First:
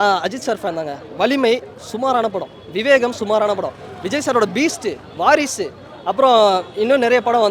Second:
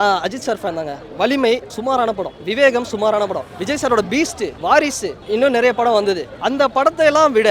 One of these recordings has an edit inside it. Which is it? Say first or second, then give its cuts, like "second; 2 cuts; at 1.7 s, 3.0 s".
second; 5 cuts; at 2.0 s, 3.5 s, 4.6 s, 5.2 s, 6.3 s